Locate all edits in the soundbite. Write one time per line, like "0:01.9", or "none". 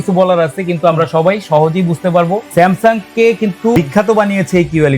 0:02.5
0:03.8